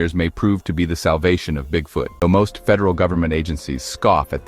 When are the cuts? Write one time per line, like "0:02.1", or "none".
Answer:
0:02.1